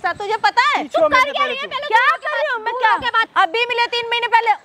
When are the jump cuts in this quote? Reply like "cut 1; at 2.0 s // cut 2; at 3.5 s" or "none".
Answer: cut 1; at 3.2 s